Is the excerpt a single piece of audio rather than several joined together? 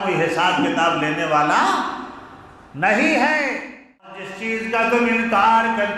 no; 1 cut; at 4.3 s

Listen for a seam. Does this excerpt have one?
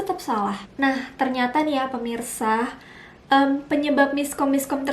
no; 0 cuts

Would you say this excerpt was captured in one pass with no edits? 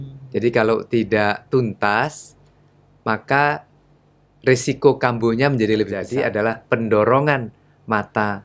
no; 1 cut; at 6.0 s

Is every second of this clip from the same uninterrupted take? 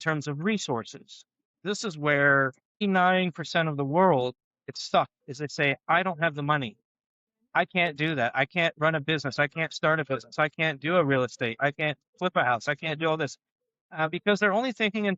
no; 3 cuts; at 1.6 s, 2.8 s, 4.8 s

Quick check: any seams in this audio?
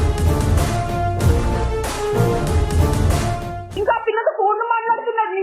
yes; 1 cut; at 3.6 s

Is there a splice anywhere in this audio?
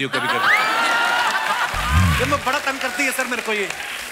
no; 0 cuts

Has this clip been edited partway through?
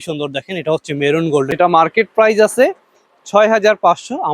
yes; 1 cut; at 1.5 s

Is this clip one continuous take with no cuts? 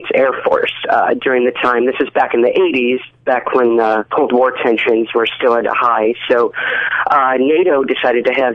no; 1 cut; at 6.5 s

